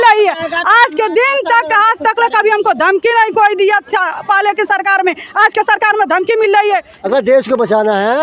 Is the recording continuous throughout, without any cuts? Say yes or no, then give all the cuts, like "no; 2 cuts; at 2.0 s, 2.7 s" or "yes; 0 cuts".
no; 1 cut; at 6.9 s